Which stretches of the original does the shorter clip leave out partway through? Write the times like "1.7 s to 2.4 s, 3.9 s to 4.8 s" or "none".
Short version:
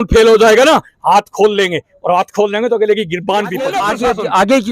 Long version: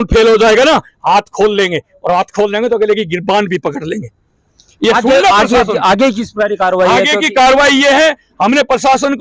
3.7 s to 5.2 s

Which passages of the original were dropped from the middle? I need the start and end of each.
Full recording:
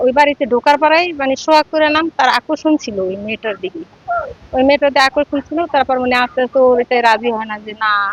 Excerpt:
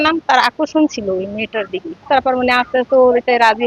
3.9 s to 5.7 s

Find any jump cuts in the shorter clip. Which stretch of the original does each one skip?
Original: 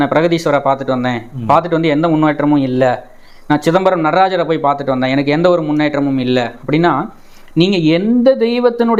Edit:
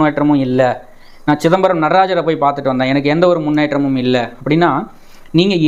none

